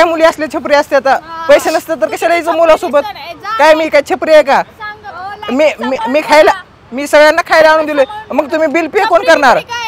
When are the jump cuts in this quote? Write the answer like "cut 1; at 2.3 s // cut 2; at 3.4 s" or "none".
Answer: none